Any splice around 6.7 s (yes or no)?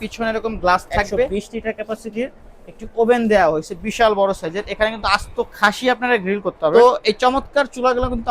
yes